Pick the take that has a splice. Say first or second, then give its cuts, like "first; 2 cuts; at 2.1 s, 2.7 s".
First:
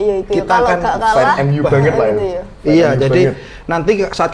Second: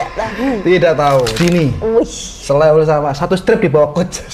second; 1 cut; at 1.3 s